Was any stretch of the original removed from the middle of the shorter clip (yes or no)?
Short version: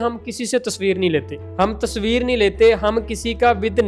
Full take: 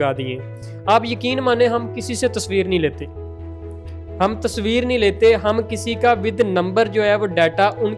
yes